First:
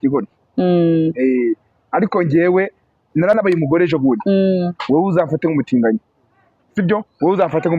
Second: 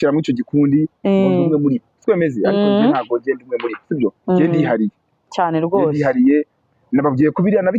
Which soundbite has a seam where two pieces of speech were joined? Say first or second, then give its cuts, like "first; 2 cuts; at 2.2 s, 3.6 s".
first; 1 cut; at 3.4 s